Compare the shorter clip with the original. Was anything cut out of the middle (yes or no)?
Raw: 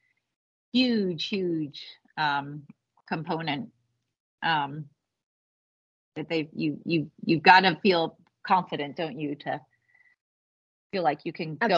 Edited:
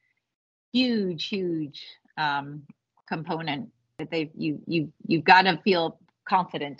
yes